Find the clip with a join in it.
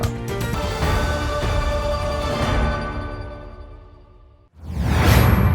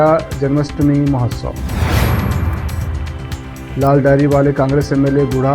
first; 1 cut; at 4.4 s

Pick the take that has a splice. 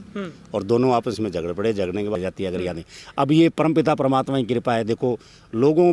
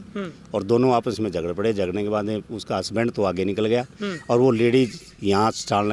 first; 1 cut; at 2.2 s

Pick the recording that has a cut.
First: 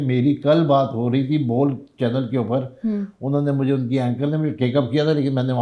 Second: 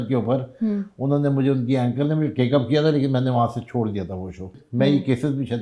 second; 1 cut; at 4.6 s

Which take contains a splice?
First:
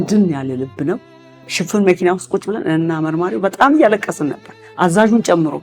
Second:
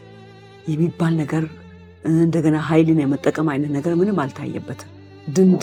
first; 1 cut; at 1.4 s

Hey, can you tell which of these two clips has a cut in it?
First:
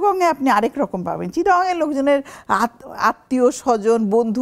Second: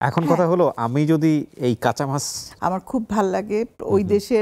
second; 1 cut; at 2.4 s

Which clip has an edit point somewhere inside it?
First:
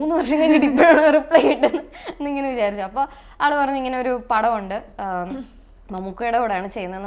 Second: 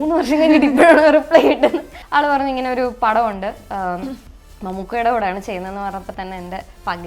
second; 1 cut; at 2.0 s

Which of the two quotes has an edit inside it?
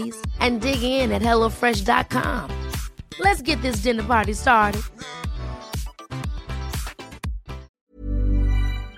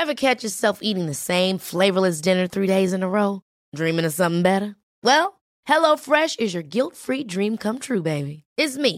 first; 1 cut; at 7.8 s

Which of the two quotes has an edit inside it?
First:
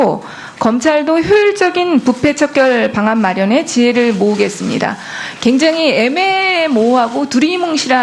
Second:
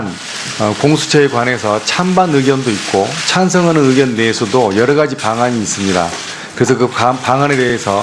second; 1 cut; at 2.7 s

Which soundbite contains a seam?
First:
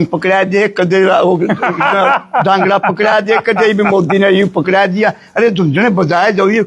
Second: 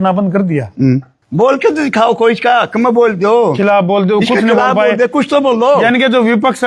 second; 1 cut; at 1.2 s

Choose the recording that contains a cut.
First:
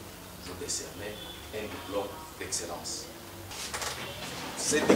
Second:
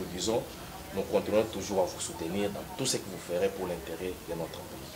first; 1 cut; at 3.5 s

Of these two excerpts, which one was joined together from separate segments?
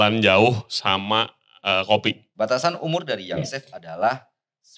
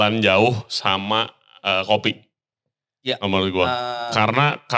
first; 1 cut; at 2.2 s

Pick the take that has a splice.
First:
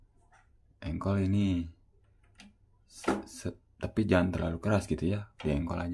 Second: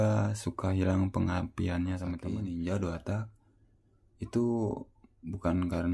second; 1 cut; at 2.2 s

